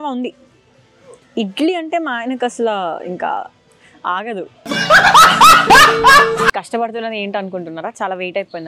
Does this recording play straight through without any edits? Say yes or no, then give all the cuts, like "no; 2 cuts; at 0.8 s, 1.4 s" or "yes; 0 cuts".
no; 1 cut; at 6.6 s